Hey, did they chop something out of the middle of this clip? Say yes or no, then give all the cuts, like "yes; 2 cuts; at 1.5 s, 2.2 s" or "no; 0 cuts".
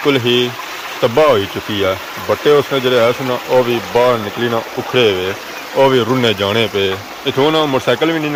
no; 0 cuts